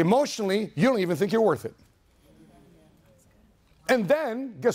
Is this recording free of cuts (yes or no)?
yes